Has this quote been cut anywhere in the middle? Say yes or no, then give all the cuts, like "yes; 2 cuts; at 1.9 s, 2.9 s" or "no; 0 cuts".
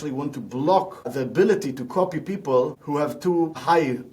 yes; 2 cuts; at 1.1 s, 3.1 s